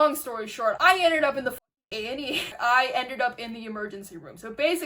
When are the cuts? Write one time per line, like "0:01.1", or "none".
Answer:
0:00.8
0:02.5